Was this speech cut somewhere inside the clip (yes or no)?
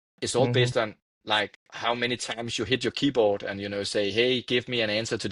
no